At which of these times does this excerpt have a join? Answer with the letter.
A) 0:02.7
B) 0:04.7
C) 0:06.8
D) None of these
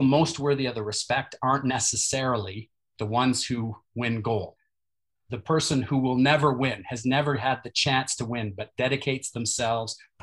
B